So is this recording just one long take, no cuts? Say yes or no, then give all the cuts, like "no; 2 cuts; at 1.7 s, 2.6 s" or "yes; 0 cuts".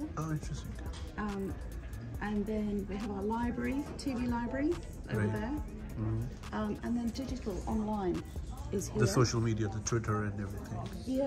yes; 0 cuts